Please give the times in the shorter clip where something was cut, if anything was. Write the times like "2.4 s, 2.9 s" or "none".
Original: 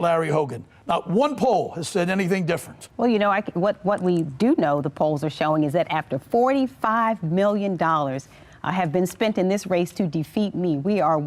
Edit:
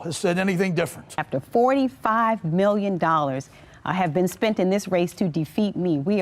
1.2 s